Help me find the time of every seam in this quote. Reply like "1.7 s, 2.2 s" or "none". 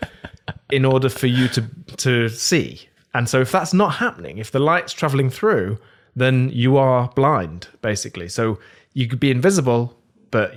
none